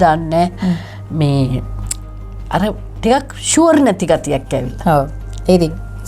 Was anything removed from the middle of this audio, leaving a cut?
no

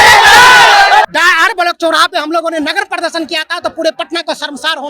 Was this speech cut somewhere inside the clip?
yes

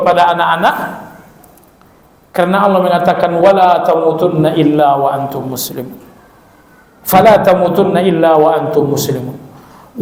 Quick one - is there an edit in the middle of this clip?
no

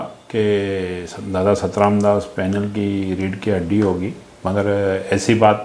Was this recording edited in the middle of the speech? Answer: no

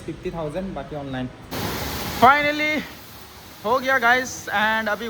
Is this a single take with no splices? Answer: no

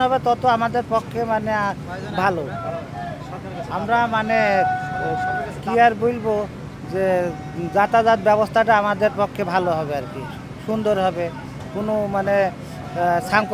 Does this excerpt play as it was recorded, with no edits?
yes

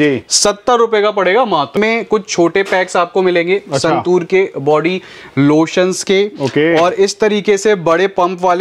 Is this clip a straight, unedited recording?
no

